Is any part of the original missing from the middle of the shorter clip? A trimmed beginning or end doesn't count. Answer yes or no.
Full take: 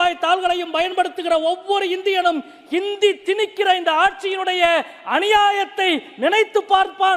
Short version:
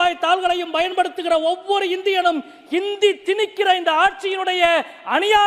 no